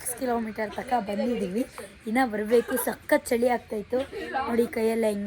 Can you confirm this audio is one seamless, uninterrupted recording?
yes; 0 cuts

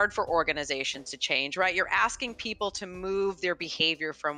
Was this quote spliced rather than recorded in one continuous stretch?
no; 0 cuts

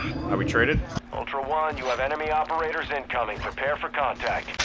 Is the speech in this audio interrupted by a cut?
yes; 1 cut; at 0.9 s

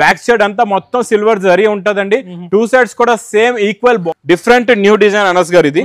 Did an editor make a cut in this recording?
yes; 1 cut; at 4.0 s

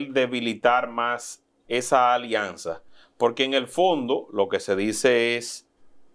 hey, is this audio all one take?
yes; 0 cuts

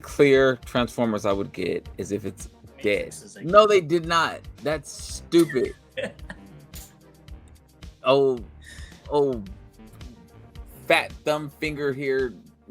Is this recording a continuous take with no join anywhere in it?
no; 3 cuts; at 3.2 s, 6.4 s, 7.6 s

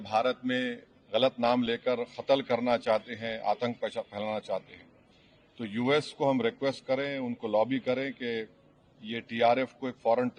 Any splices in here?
no; 0 cuts

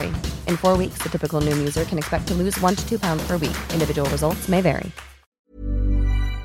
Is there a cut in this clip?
yes; 1 cut; at 5.3 s

